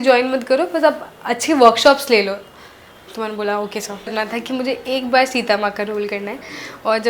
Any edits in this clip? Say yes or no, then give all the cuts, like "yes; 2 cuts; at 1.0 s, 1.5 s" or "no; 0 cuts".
yes; 1 cut; at 4.1 s